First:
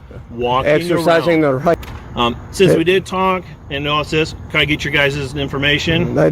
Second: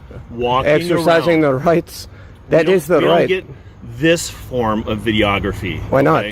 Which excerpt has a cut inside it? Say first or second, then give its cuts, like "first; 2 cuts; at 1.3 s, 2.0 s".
first; 1 cut; at 1.7 s